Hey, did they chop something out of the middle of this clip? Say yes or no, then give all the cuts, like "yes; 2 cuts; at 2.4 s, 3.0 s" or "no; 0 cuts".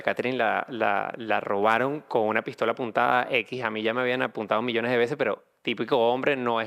no; 0 cuts